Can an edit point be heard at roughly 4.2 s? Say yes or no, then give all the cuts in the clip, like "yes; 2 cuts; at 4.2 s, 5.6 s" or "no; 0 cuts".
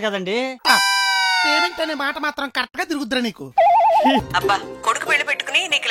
yes; 1 cut; at 4.2 s